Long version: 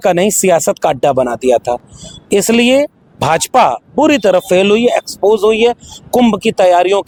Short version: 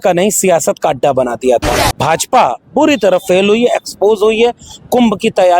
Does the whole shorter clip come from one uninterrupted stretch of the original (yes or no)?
no